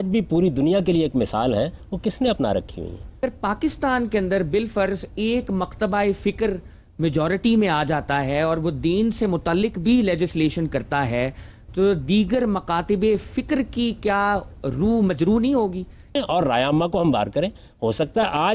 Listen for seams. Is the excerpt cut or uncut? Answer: cut